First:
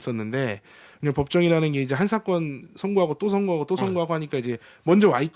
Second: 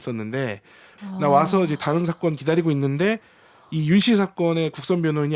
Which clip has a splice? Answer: second; 1 cut; at 0.9 s

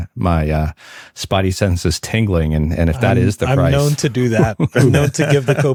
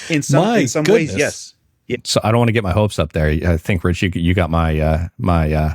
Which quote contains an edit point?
second; 1 cut; at 1.8 s

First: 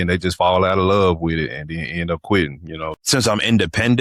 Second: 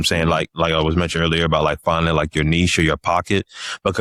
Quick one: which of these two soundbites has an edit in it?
first; 1 cut; at 2.9 s

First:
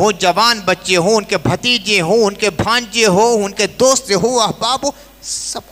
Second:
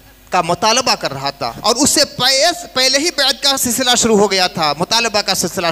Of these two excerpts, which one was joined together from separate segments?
second; 1 cut; at 1.6 s

